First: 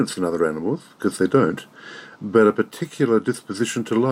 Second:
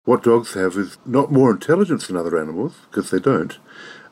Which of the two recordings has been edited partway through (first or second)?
second